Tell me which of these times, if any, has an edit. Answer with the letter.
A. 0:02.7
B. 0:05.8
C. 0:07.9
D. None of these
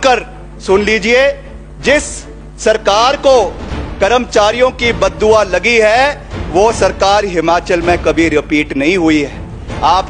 D